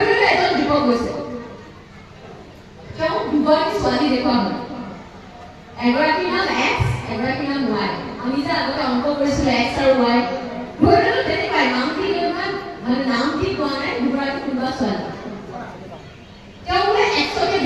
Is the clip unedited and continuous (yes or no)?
yes